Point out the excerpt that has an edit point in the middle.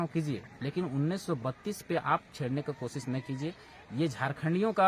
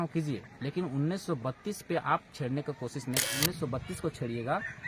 second; 1 cut; at 3.4 s

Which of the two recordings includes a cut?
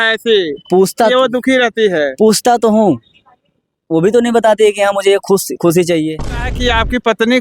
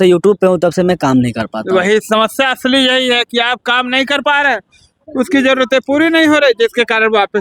first; 1 cut; at 6.5 s

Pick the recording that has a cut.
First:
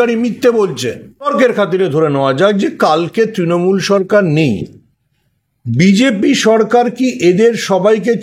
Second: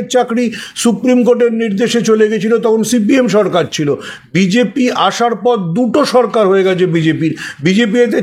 first; 1 cut; at 1.3 s

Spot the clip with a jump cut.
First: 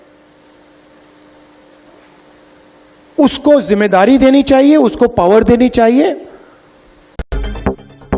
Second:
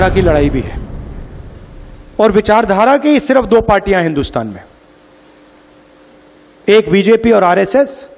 first; 1 cut; at 7.3 s

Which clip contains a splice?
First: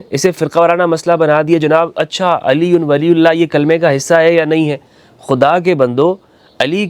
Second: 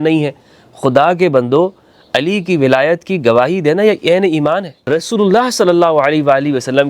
second; 1 cut; at 4.7 s

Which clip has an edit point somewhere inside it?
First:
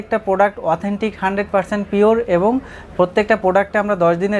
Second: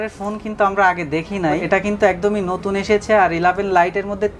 second; 1 cut; at 1.6 s

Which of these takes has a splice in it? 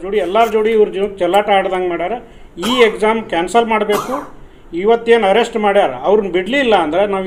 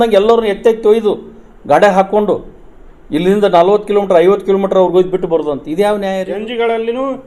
second; 1 cut; at 6.3 s

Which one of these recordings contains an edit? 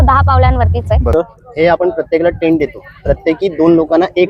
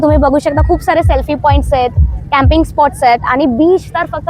first; 1 cut; at 1.1 s

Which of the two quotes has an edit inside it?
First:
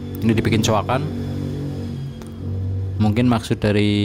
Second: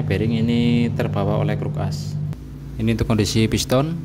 second; 1 cut; at 2.4 s

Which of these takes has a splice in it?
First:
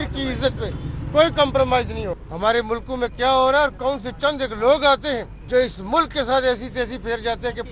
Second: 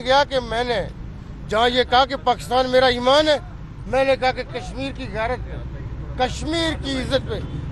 first; 2 cuts; at 2.3 s, 5.3 s

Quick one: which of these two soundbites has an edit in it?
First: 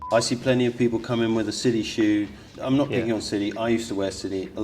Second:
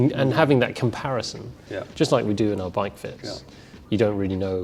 first; 1 cut; at 2.5 s

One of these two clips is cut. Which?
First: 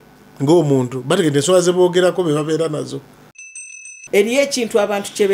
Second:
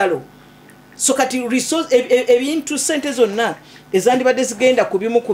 first; 1 cut; at 3.8 s

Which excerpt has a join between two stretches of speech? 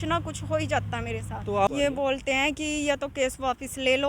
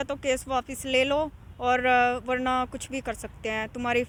first; 1 cut; at 1.7 s

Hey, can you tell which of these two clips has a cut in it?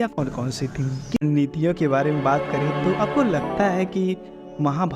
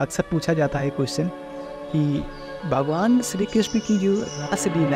first; 1 cut; at 1.2 s

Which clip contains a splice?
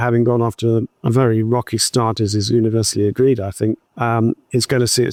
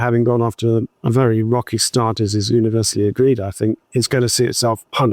second; 1 cut; at 3.9 s

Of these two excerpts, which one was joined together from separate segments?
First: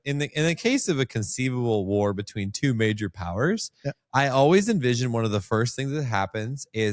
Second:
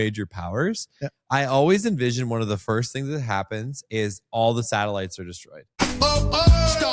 second; 1 cut; at 5.7 s

